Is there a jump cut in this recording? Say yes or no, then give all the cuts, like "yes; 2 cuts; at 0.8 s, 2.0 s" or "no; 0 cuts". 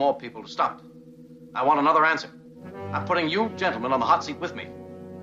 yes; 1 cut; at 2.4 s